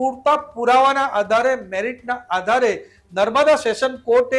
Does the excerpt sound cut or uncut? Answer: uncut